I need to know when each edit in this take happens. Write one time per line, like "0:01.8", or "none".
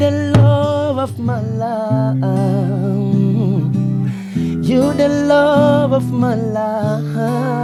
none